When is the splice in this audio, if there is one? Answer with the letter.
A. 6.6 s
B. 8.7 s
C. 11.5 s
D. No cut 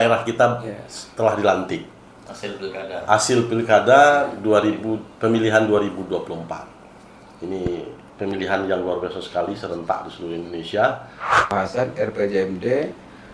C